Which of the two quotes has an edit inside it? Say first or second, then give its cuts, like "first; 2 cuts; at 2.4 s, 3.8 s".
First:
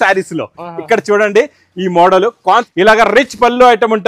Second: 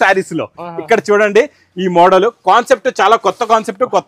first; 1 cut; at 2.6 s